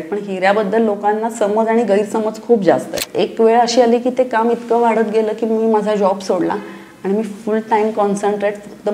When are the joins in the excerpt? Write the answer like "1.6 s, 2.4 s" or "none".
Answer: 3.0 s